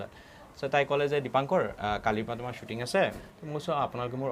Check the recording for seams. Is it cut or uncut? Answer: cut